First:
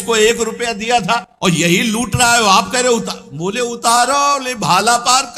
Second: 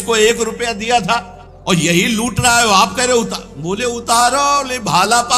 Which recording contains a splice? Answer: first; 1 cut; at 1.8 s

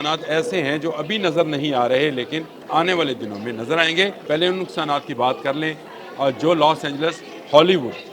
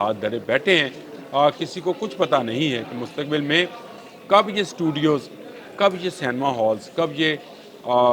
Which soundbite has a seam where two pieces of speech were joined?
first; 2 cuts; at 2.5 s, 4.2 s

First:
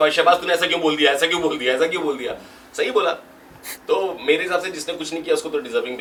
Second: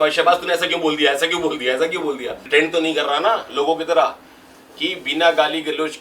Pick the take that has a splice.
second; 1 cut; at 2.4 s

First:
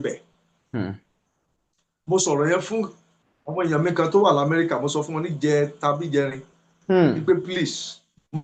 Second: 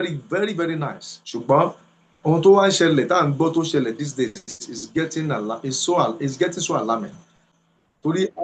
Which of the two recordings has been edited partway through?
second; 1 cut; at 7.4 s

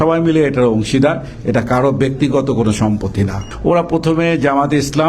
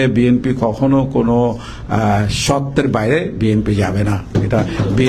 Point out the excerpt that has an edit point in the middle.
first; 1 cut; at 3.5 s

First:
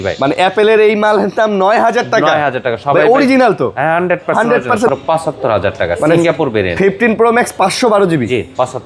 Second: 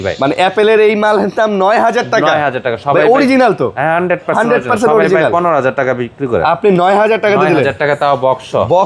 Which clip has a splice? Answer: first; 1 cut; at 4.9 s

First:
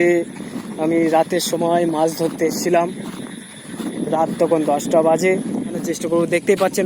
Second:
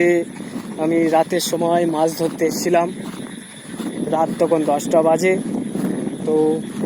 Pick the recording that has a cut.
first; 1 cut; at 5.9 s

